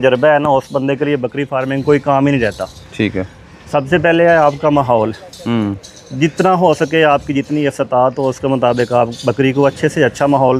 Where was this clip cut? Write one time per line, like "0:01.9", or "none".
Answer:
none